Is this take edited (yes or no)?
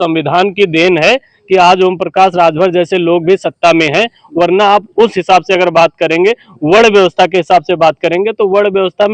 no